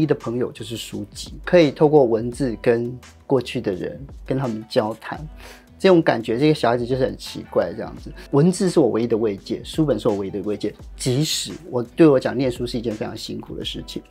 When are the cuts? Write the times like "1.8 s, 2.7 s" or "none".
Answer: none